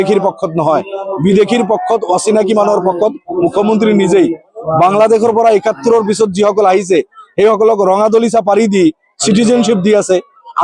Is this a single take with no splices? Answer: yes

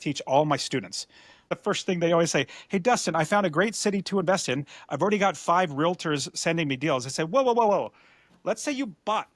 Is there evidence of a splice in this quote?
yes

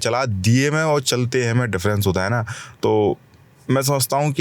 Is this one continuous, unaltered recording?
yes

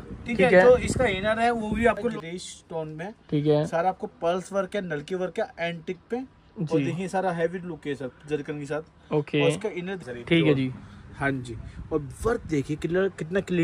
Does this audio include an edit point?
yes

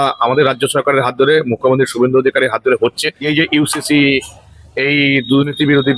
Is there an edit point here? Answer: yes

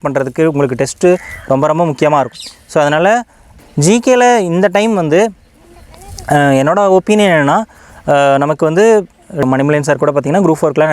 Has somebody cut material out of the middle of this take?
yes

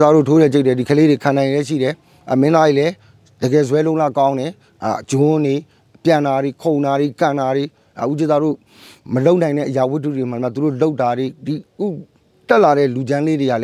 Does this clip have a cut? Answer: no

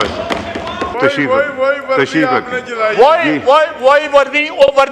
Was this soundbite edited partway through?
yes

